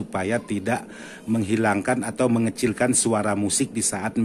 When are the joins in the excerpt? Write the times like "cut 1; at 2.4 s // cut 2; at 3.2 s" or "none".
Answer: none